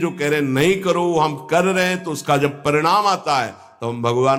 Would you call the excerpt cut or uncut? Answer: uncut